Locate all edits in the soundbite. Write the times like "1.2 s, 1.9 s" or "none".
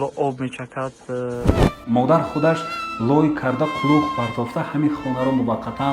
1.5 s